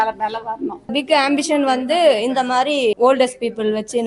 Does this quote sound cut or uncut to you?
cut